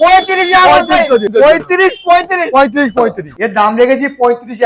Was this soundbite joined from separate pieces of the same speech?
yes; 2 cuts; at 1.3 s, 3.2 s

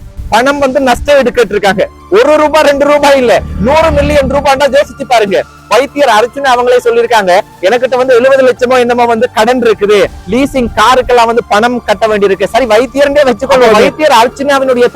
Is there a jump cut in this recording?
yes; 1 cut; at 13.7 s

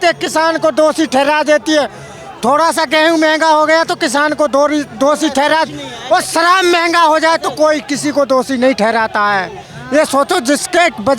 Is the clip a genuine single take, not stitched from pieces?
yes; 0 cuts

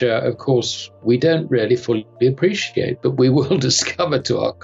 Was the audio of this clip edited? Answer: no; 0 cuts

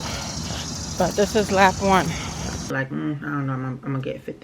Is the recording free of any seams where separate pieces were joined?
no; 1 cut; at 2.6 s

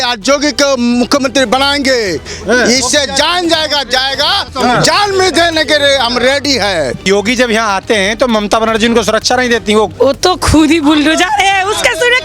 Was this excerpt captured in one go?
no; 2 cuts; at 7.0 s, 9.9 s

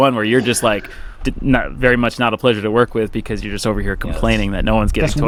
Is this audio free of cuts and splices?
yes; 0 cuts

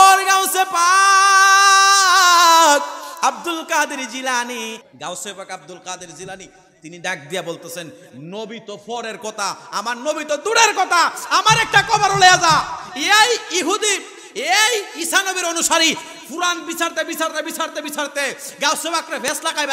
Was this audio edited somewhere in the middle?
yes; 1 cut; at 4.8 s

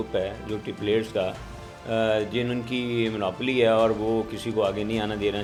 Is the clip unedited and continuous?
yes; 0 cuts

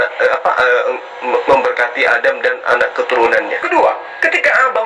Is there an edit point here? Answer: yes; 1 cut; at 3.6 s

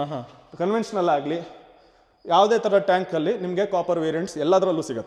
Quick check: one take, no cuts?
yes; 0 cuts

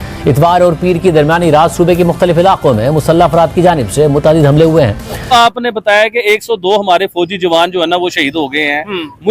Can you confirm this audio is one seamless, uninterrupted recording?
no; 1 cut; at 5.3 s

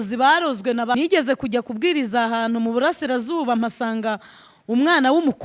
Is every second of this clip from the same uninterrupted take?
no; 1 cut; at 0.9 s

